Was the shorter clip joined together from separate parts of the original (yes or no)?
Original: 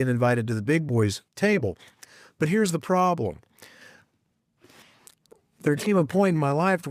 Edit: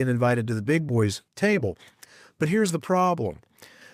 no